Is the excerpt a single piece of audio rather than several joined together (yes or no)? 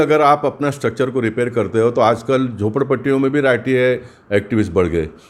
yes